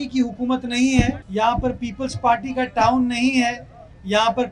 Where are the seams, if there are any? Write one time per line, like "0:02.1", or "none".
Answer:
0:01.2